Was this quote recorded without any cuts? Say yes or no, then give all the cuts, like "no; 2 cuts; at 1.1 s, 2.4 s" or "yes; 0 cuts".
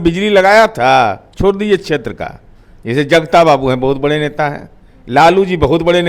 no; 1 cut; at 1.2 s